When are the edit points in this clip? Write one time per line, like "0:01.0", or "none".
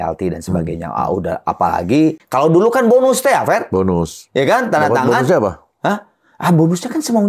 0:02.2